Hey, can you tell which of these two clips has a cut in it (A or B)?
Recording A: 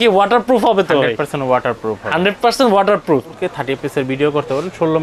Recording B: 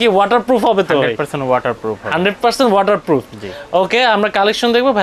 A